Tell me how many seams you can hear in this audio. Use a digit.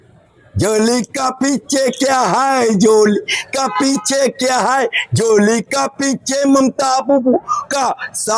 0